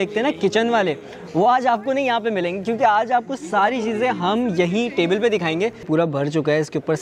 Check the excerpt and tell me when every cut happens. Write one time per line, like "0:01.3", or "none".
0:05.9